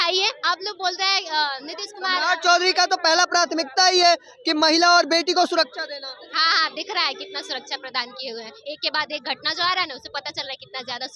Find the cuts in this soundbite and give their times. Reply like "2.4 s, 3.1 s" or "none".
none